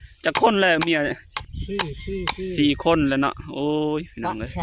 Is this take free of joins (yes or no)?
no